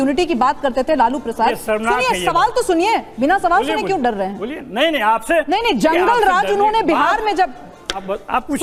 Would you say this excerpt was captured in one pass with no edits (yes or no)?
yes